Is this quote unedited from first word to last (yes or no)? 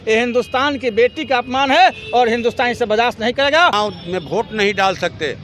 no